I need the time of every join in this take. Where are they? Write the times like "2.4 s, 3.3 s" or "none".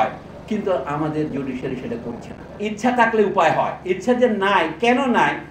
2.6 s